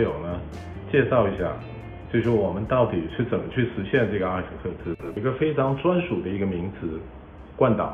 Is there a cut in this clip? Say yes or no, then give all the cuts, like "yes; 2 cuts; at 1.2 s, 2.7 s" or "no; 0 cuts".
yes; 1 cut; at 5.2 s